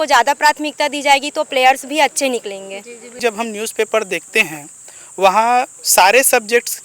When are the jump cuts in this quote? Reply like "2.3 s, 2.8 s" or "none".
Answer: 3.1 s